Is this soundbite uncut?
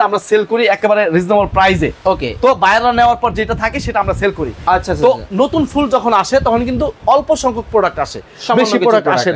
yes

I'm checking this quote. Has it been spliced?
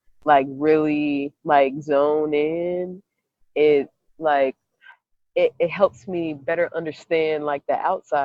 no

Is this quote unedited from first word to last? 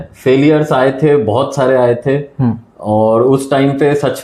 yes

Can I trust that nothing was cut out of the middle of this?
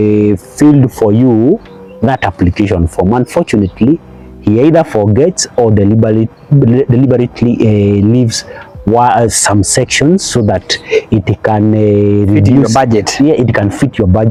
yes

